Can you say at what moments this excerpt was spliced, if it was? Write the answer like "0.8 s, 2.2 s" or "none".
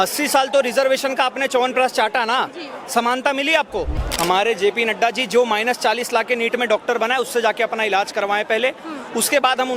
4.0 s